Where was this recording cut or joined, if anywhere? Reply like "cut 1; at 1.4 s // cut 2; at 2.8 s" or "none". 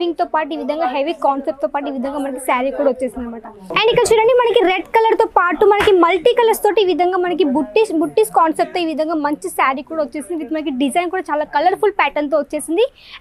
cut 1; at 3.6 s